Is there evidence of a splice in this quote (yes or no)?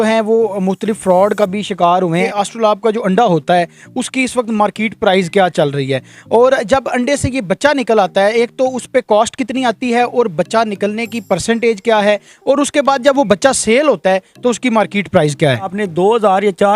yes